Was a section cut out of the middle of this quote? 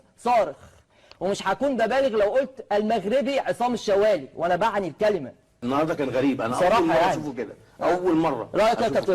yes; 1 cut; at 5.6 s

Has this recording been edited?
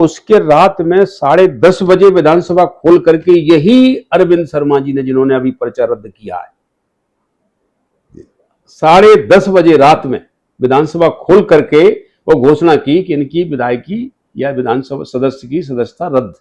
no; 0 cuts

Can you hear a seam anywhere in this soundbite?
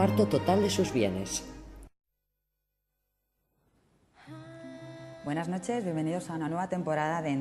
no; 0 cuts

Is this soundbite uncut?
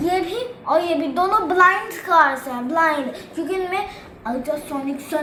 yes; 0 cuts

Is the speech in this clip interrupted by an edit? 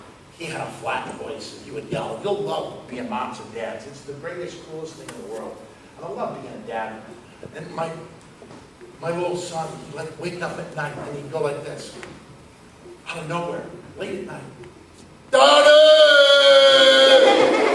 yes; 1 cut; at 15.8 s

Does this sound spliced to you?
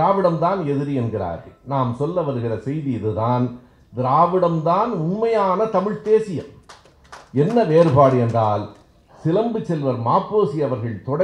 no; 0 cuts

